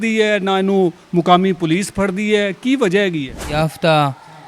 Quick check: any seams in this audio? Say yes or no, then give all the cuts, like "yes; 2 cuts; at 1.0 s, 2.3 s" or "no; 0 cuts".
yes; 1 cut; at 3.5 s